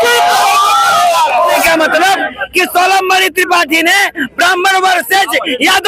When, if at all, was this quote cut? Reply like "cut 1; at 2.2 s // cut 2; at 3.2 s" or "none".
cut 1; at 1.6 s